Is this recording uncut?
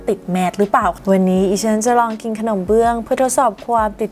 no; 1 cut; at 1.0 s

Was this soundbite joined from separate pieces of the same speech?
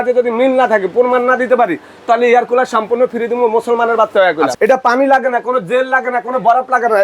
yes; 1 cut; at 4.5 s

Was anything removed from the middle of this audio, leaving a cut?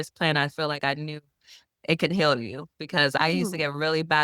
yes; 1 cut; at 3.2 s

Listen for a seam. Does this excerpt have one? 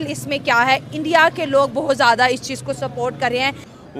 no; 0 cuts

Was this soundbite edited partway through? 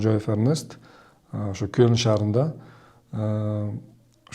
no; 0 cuts

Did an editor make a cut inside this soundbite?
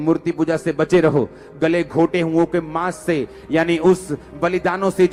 no; 0 cuts

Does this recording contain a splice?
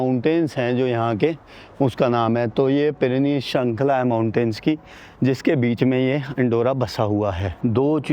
no; 0 cuts

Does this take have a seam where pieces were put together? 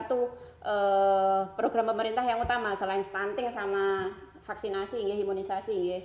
no; 0 cuts

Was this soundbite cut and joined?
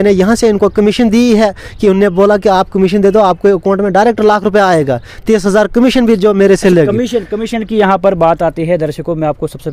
no; 0 cuts

